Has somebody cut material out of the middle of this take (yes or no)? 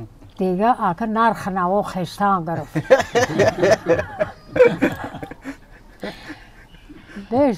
no